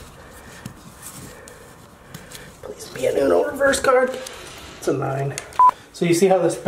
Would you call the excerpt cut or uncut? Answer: cut